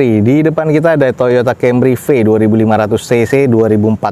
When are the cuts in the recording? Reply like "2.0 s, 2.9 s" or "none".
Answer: none